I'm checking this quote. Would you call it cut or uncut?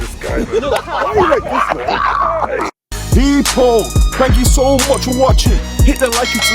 cut